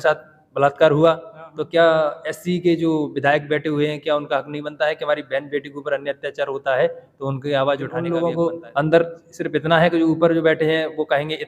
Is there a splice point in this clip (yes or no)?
yes